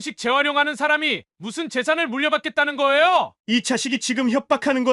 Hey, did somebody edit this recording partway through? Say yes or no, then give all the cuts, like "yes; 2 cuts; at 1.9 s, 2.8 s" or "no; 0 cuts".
yes; 1 cut; at 3.3 s